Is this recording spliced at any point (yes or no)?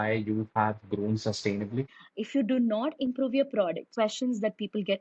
yes